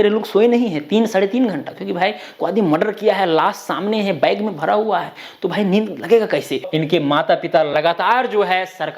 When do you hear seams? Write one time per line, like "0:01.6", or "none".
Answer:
0:06.6

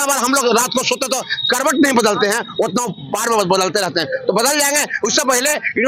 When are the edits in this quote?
none

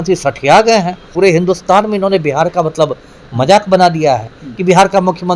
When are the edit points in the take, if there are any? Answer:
0:01.1

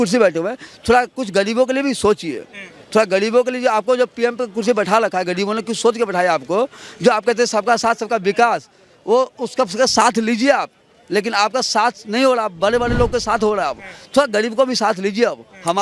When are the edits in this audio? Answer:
none

